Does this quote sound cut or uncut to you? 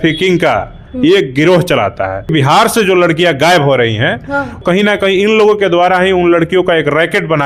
cut